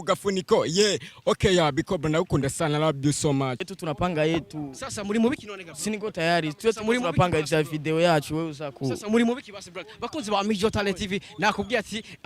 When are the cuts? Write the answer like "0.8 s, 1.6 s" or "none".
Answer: 3.6 s